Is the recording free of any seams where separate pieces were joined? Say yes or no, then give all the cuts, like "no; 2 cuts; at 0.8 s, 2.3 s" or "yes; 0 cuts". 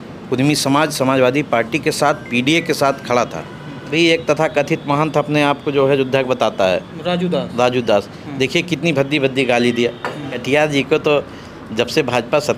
no; 2 cuts; at 3.9 s, 10.3 s